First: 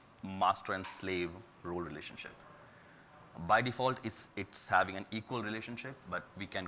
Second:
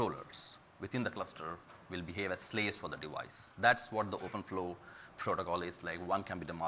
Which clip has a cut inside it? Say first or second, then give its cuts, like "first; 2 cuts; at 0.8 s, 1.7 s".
first; 1 cut; at 1.2 s